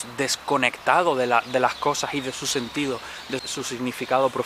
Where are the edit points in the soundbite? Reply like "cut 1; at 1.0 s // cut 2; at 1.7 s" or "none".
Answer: cut 1; at 3.4 s